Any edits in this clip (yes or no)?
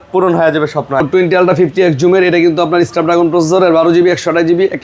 yes